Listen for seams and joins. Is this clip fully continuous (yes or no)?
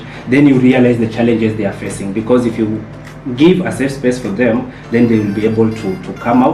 yes